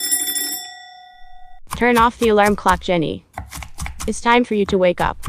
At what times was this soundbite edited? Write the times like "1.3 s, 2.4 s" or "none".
1.5 s